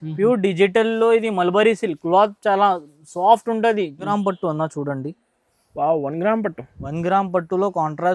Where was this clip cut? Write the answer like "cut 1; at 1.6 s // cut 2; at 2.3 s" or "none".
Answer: cut 1; at 4.1 s